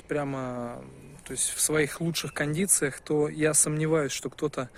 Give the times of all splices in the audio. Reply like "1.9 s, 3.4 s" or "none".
none